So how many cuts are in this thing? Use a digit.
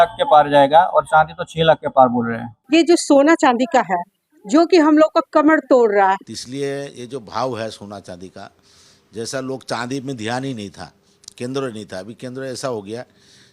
2